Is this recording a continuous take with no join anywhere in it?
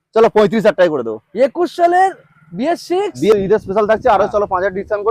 no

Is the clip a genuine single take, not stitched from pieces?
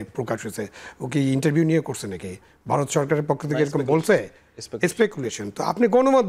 yes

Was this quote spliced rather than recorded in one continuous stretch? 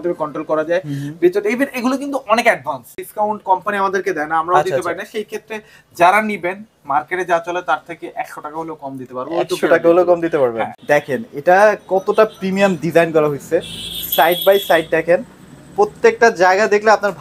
yes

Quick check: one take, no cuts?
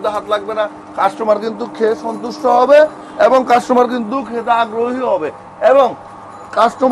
yes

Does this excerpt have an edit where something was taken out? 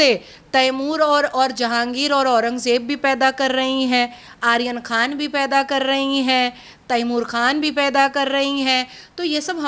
no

